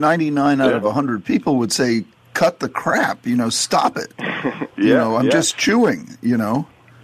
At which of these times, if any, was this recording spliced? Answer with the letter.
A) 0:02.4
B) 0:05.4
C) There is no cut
C